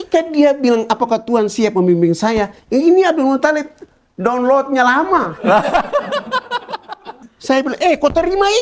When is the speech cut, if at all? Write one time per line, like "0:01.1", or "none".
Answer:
0:07.3